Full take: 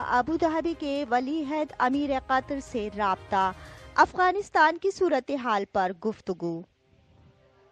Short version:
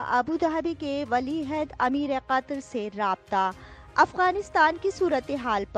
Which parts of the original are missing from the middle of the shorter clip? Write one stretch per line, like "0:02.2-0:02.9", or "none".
none